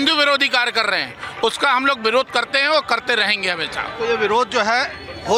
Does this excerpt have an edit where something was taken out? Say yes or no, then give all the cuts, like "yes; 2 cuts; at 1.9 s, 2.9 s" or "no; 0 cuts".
no; 0 cuts